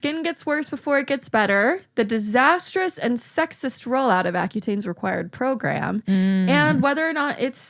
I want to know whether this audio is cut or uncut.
uncut